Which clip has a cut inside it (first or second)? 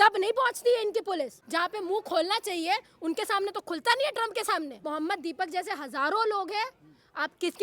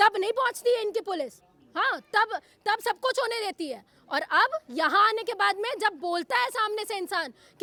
first